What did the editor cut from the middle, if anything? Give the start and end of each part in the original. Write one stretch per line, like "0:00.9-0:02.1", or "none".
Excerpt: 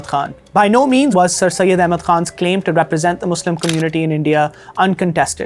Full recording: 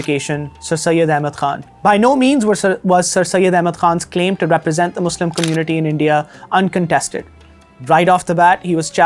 0:02.4-0:02.9